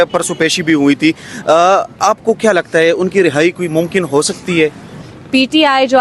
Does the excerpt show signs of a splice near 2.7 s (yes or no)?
no